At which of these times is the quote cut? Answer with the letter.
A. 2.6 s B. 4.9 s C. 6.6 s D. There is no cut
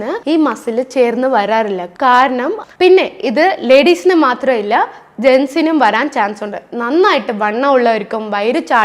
A